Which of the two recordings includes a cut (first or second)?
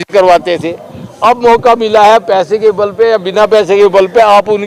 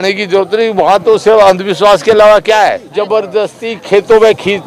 second